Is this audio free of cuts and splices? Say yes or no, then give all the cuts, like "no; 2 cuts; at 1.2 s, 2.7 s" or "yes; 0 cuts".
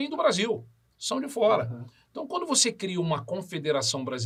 yes; 0 cuts